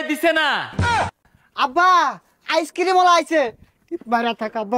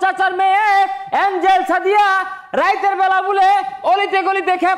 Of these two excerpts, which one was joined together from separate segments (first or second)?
first